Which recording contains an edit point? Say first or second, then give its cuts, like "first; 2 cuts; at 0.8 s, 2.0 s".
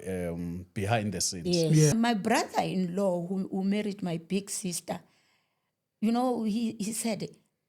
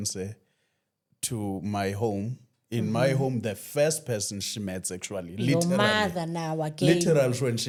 first; 1 cut; at 1.9 s